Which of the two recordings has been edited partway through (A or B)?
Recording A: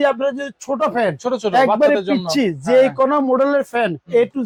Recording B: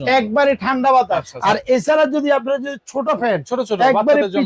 B